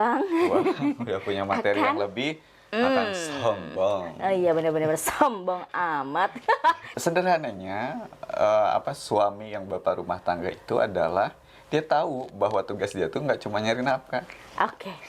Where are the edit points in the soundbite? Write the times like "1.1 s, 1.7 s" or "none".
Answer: 6.9 s